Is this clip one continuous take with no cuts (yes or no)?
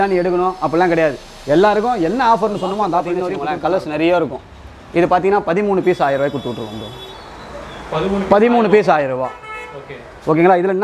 no